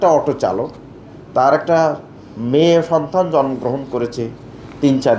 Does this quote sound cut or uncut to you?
uncut